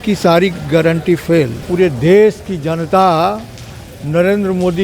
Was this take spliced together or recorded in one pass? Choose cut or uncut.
cut